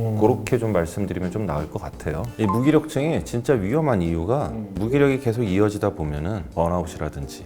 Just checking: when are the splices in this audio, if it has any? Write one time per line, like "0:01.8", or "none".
0:02.3
0:06.4